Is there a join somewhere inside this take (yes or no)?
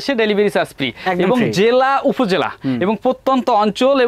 no